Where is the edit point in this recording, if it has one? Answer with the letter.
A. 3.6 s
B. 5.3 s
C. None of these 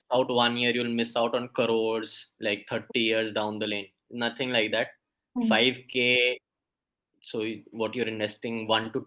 C